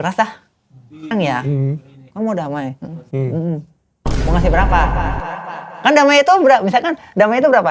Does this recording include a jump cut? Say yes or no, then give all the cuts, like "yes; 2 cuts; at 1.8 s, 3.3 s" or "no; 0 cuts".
yes; 1 cut; at 1.1 s